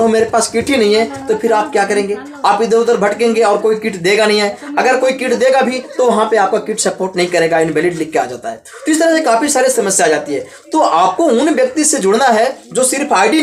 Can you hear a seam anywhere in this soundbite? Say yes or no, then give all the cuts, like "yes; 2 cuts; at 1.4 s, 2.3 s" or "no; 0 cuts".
no; 0 cuts